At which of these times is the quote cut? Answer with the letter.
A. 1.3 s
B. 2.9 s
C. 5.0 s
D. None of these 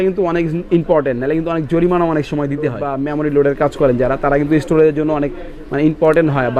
B